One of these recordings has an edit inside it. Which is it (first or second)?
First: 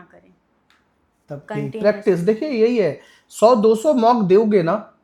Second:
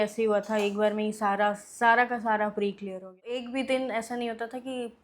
second